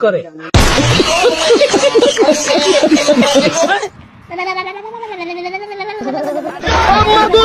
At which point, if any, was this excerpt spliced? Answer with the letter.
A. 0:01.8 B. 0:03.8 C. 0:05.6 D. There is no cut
D